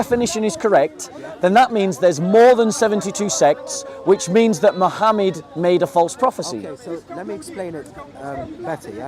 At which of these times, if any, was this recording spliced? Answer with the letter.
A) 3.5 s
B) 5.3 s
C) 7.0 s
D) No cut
D